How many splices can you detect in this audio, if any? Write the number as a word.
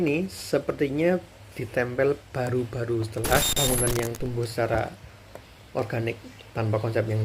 one